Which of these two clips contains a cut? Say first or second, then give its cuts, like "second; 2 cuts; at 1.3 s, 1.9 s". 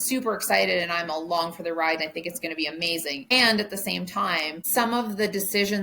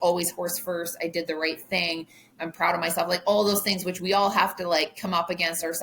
first; 2 cuts; at 3.3 s, 4.6 s